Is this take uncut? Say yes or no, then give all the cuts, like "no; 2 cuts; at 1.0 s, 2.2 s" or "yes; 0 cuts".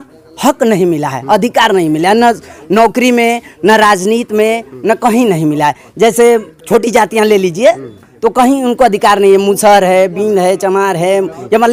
yes; 0 cuts